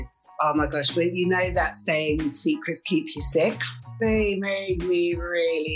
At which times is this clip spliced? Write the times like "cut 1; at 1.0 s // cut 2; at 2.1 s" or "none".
cut 1; at 3.9 s